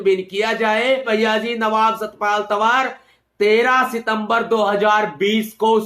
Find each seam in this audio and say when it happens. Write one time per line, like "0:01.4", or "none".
0:01.0